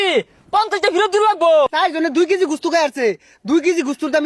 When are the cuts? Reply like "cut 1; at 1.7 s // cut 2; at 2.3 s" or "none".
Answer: cut 1; at 1.7 s